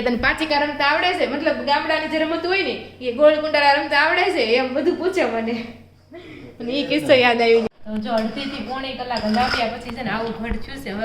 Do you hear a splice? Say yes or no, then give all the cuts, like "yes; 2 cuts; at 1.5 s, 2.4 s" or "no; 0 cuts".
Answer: yes; 1 cut; at 7.7 s